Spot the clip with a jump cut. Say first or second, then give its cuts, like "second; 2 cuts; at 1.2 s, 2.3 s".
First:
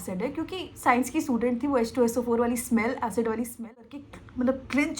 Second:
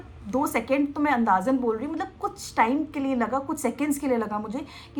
first; 1 cut; at 3.7 s